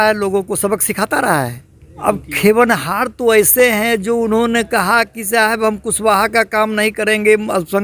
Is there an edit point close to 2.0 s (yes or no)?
yes